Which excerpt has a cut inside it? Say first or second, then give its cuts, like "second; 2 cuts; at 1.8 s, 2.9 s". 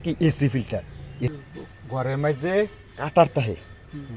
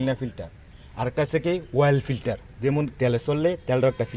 first; 1 cut; at 1.3 s